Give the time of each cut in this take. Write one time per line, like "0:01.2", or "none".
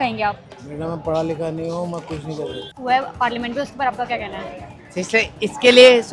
0:02.7